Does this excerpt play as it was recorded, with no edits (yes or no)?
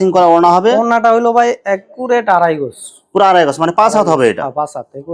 yes